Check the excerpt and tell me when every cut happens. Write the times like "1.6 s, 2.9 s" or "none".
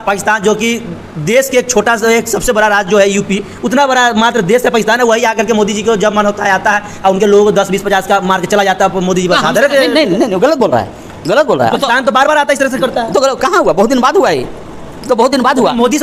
none